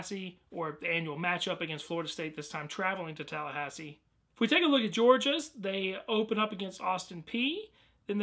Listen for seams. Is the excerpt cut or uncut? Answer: cut